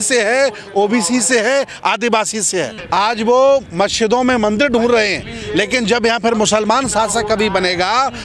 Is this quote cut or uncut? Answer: cut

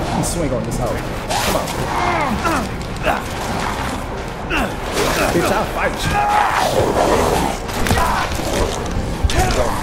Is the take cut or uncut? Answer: uncut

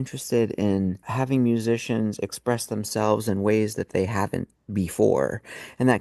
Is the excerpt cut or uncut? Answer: cut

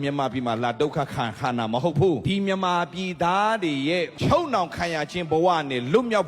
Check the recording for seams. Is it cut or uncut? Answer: cut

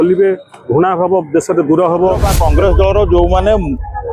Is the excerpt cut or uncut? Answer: cut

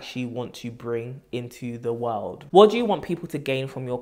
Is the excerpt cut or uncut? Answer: uncut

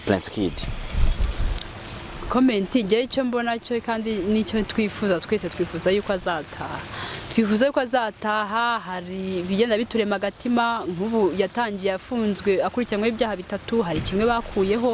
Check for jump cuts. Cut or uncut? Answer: uncut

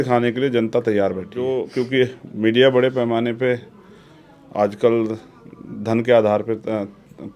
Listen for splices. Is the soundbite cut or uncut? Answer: cut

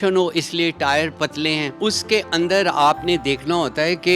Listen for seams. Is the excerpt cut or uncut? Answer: cut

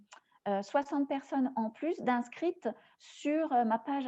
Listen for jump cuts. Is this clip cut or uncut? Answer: uncut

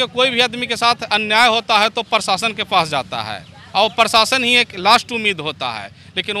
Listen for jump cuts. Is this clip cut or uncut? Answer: uncut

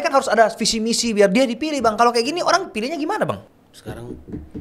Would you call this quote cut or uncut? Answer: cut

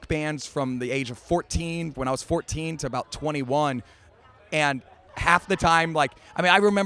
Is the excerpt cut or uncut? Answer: uncut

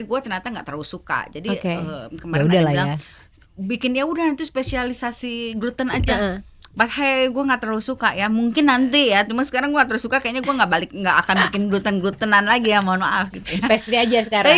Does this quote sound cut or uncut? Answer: uncut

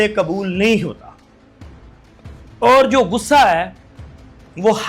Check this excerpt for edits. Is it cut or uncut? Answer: uncut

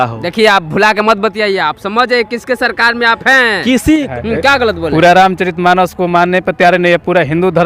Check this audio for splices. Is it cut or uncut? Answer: cut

